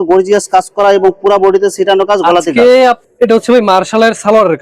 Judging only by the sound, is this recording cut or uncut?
cut